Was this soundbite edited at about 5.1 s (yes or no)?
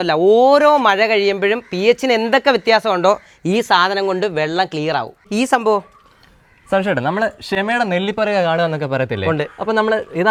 no